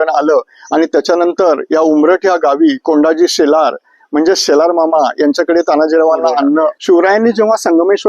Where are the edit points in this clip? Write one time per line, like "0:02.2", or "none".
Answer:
0:06.8